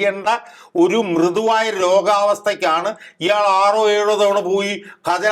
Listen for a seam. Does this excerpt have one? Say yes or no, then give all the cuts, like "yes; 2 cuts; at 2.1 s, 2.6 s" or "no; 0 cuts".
no; 0 cuts